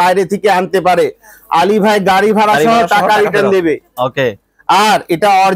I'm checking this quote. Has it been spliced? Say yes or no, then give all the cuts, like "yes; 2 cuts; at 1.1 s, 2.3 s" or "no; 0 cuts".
no; 0 cuts